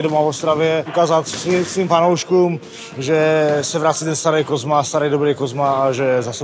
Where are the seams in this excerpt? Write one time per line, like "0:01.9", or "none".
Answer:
0:00.9